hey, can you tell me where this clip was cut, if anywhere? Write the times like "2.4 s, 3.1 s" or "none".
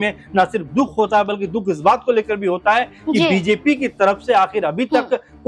none